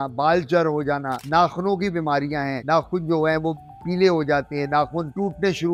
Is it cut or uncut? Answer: uncut